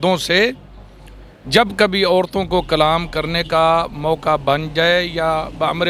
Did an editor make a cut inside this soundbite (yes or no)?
no